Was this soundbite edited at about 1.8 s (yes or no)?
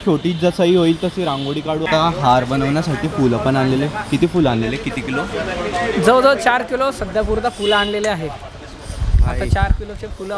no